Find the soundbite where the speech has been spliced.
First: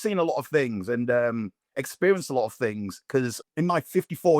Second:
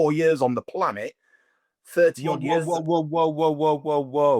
first; 1 cut; at 3.4 s

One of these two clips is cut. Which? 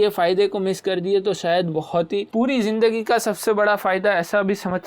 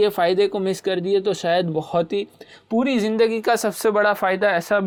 first; 1 cut; at 2.3 s

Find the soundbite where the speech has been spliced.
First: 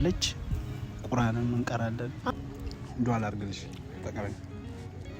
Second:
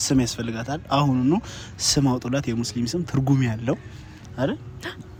first; 1 cut; at 2.3 s

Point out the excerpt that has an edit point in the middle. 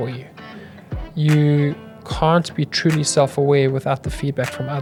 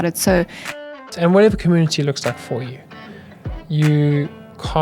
second; 1 cut; at 1.0 s

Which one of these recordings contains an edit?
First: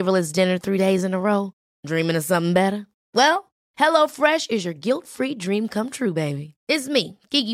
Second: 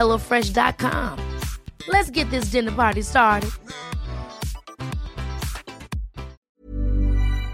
second; 1 cut; at 6.4 s

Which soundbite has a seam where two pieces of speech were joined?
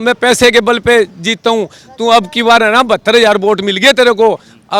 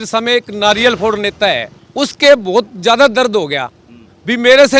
second; 1 cut; at 1.8 s

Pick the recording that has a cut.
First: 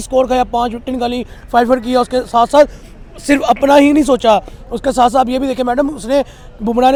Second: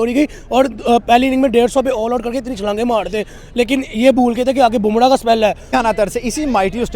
second; 1 cut; at 5.7 s

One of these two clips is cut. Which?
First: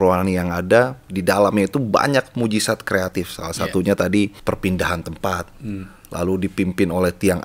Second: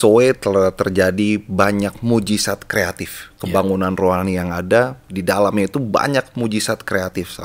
first; 1 cut; at 4.4 s

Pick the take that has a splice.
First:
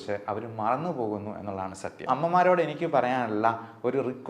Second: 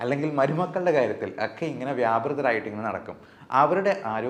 first; 1 cut; at 2.1 s

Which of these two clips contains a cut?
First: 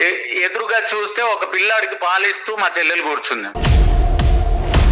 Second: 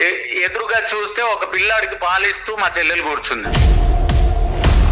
second; 1 cut; at 3.4 s

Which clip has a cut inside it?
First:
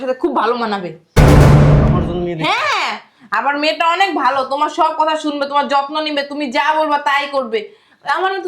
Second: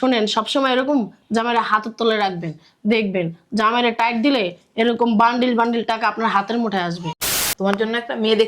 second; 1 cut; at 7.3 s

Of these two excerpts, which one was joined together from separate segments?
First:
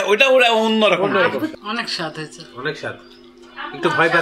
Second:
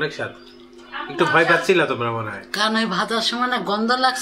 first; 1 cut; at 1.5 s

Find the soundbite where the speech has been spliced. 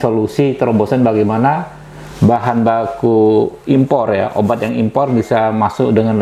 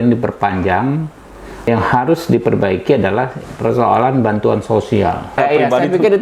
second; 2 cuts; at 1.7 s, 5.4 s

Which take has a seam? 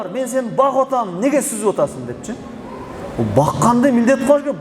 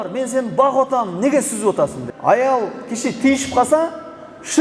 second; 1 cut; at 2.1 s

